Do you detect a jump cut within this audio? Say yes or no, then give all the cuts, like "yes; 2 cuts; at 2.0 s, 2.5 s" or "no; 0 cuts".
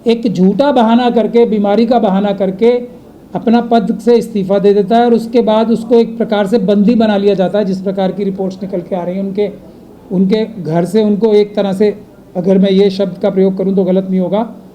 no; 0 cuts